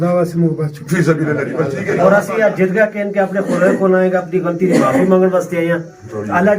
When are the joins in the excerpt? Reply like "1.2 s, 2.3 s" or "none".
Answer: 2.0 s